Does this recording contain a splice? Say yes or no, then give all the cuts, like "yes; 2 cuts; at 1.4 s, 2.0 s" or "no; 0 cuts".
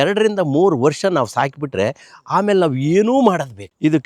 no; 0 cuts